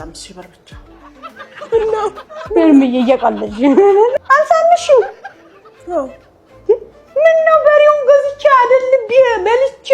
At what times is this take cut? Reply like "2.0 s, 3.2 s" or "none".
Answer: 4.2 s